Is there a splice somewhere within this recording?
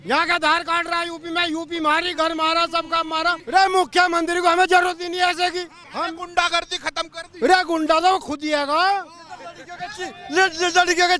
yes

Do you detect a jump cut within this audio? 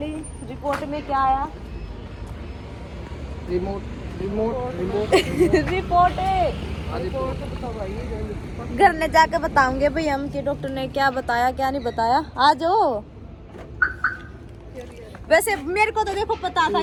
no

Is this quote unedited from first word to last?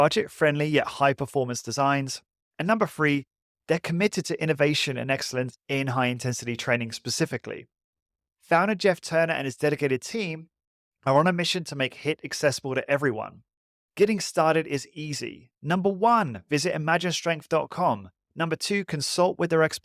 yes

